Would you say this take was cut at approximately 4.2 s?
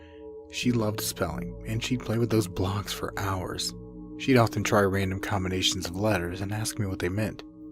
yes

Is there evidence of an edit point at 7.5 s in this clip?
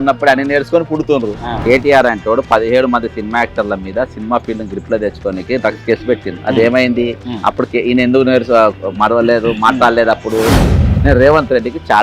no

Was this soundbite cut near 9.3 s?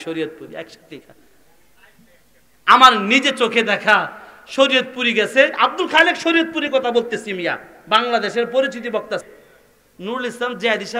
yes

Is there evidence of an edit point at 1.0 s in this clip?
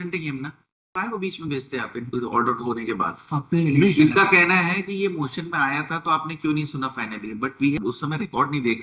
yes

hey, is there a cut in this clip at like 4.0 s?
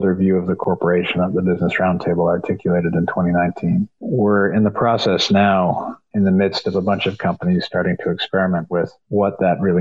yes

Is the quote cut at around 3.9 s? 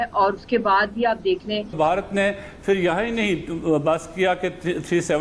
no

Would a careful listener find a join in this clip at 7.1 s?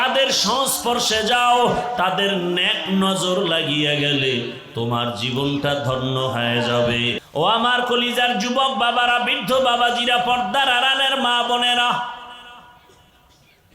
yes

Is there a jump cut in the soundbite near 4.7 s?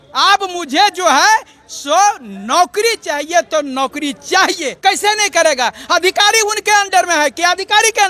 yes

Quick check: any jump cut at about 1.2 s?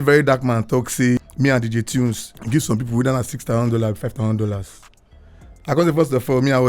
yes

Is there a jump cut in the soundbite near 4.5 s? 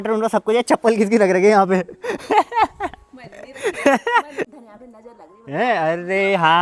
yes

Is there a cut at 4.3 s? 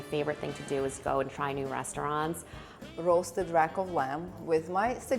no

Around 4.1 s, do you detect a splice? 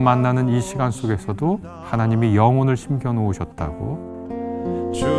yes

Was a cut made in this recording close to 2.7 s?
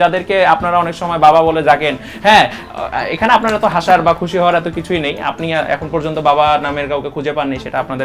no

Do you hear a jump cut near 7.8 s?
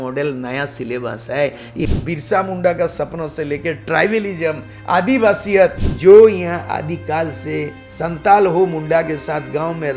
no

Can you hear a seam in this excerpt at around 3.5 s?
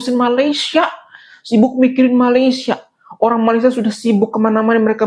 no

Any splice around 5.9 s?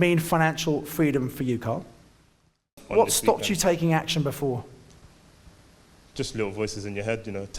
no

